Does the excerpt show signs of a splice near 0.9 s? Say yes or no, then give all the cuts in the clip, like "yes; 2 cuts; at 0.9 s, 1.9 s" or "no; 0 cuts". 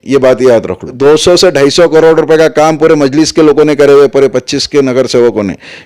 yes; 1 cut; at 0.9 s